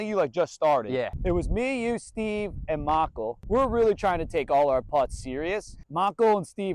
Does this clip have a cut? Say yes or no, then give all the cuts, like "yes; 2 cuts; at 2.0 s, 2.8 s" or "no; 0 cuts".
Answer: yes; 3 cuts; at 0.8 s, 3.4 s, 5.8 s